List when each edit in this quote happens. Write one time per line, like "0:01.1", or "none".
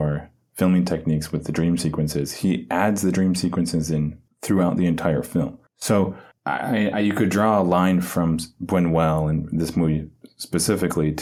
none